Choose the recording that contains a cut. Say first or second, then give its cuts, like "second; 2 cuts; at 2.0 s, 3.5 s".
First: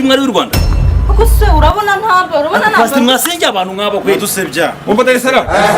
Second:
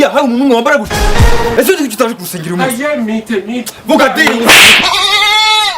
second; 1 cut; at 4.8 s